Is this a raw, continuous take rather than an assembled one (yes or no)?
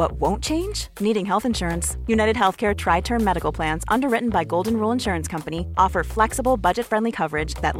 yes